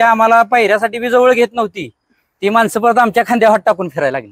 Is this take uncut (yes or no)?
yes